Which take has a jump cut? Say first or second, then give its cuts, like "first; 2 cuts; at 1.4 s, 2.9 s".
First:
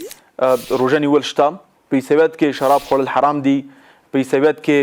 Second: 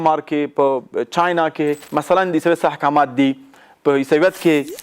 second; 1 cut; at 1.8 s